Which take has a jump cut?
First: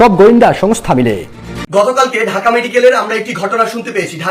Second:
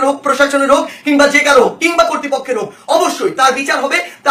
first; 1 cut; at 1.7 s

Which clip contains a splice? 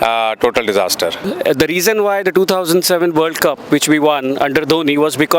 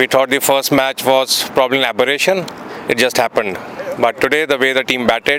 first; 1 cut; at 1.3 s

